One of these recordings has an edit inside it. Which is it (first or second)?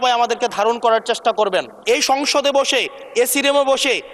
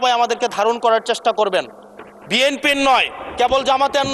first